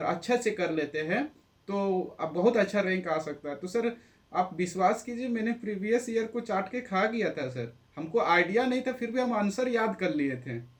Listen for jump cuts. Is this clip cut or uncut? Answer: uncut